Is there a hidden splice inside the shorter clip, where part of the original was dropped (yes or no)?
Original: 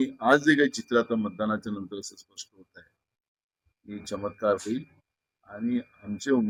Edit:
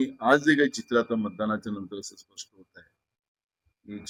no